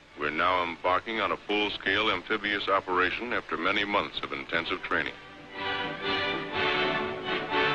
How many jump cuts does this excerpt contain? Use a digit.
1